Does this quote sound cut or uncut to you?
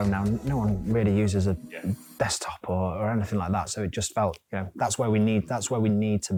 uncut